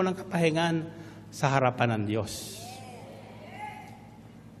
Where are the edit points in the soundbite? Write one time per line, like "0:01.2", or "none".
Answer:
none